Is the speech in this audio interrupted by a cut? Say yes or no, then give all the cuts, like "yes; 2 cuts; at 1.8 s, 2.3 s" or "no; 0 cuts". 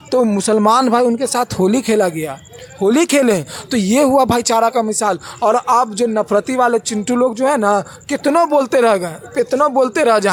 no; 0 cuts